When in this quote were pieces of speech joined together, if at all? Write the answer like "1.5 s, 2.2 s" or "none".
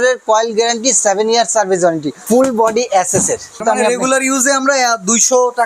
2.1 s, 3.6 s